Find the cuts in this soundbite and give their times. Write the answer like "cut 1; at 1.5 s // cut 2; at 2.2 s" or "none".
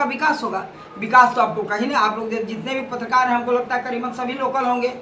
none